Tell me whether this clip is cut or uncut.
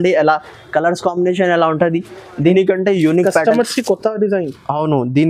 cut